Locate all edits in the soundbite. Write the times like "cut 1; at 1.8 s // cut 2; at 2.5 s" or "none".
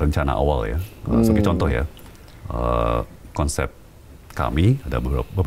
none